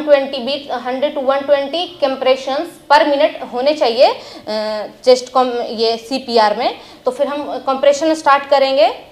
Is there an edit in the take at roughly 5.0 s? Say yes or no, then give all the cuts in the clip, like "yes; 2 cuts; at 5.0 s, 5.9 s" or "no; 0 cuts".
no; 0 cuts